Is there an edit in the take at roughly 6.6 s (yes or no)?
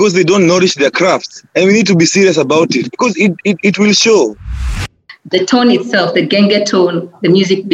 no